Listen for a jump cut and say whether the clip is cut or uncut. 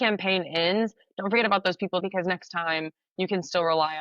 cut